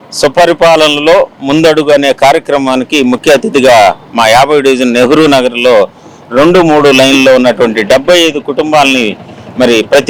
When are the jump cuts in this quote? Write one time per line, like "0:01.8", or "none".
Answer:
none